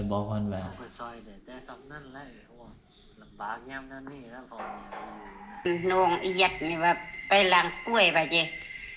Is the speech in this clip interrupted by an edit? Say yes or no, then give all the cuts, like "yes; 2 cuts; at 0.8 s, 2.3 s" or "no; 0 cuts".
yes; 1 cut; at 5.7 s